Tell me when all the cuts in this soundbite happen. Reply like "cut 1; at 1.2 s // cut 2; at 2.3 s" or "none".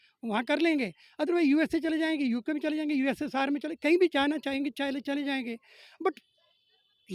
none